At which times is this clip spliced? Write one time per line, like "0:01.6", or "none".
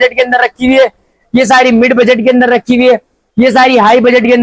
none